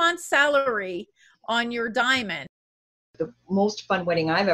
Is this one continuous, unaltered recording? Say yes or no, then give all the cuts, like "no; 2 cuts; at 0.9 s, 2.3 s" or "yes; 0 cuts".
no; 1 cut; at 2.9 s